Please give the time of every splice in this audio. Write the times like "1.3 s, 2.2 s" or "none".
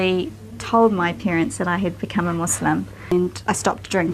3.1 s